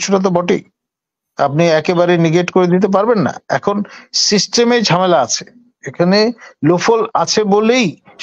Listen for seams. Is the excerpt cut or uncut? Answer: uncut